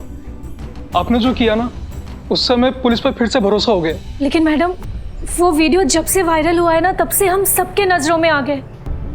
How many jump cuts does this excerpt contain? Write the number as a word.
one